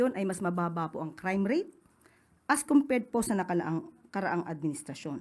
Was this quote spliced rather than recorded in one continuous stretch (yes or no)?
no